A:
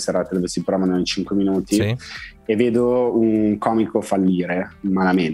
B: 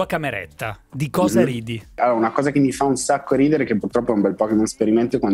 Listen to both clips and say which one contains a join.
B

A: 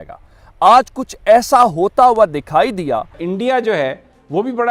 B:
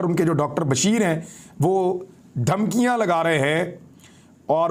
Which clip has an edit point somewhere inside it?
A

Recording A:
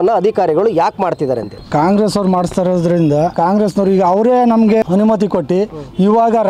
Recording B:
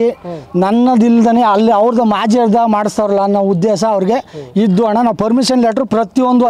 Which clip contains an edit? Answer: A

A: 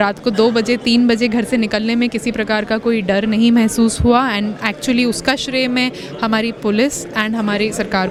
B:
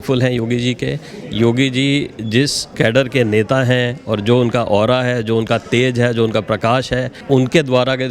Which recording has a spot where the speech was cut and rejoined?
B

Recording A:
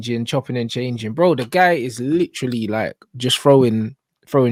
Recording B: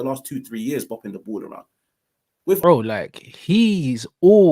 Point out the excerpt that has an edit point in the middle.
B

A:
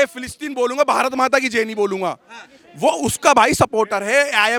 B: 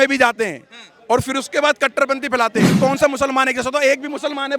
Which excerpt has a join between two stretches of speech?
B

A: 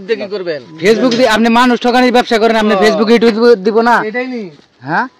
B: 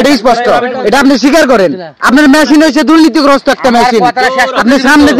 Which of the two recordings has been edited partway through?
B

